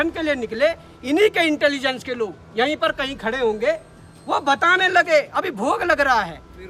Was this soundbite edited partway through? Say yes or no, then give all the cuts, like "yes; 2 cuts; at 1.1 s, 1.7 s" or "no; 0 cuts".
no; 0 cuts